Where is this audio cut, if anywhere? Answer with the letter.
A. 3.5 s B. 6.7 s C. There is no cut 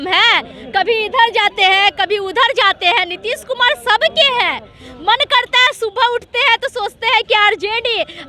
C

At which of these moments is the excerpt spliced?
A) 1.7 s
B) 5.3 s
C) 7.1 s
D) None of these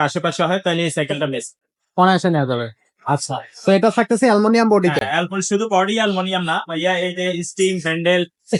D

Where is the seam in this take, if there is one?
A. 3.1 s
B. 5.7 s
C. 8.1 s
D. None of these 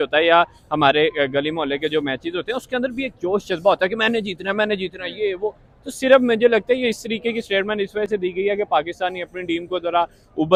D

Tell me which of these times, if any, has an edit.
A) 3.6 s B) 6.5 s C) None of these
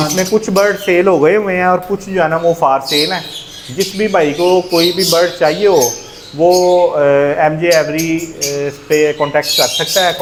C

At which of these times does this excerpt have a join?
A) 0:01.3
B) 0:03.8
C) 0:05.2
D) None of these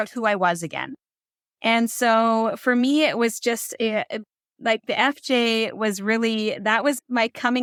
D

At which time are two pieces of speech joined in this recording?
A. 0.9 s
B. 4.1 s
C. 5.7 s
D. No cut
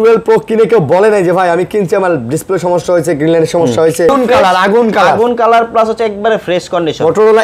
B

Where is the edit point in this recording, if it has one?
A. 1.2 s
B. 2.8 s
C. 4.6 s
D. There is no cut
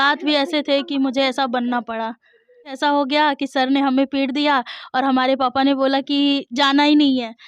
B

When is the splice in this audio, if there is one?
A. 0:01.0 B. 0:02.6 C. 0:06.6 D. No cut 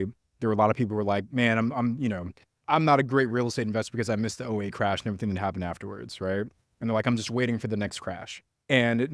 B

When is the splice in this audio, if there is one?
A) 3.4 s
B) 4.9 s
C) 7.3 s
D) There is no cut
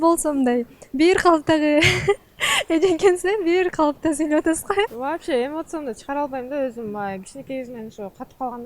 B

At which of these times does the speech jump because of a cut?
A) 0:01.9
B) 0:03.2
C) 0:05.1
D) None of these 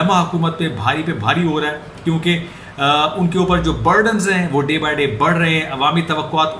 D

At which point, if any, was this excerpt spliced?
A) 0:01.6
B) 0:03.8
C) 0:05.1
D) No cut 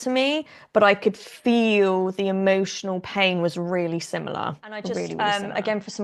C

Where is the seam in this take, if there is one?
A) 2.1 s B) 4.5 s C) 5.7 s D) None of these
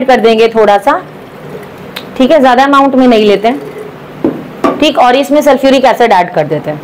D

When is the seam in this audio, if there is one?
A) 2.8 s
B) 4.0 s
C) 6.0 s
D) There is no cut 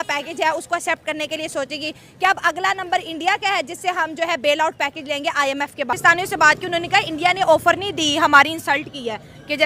C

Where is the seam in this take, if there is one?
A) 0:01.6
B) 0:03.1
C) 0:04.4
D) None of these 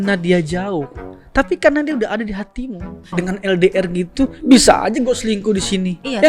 B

